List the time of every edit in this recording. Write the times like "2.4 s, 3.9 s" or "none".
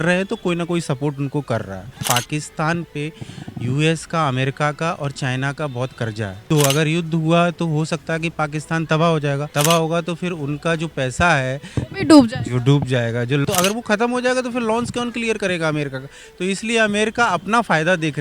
2.0 s, 6.4 s, 9.5 s, 13.4 s